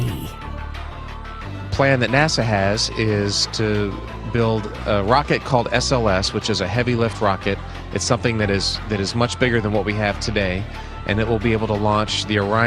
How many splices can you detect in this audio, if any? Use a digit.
1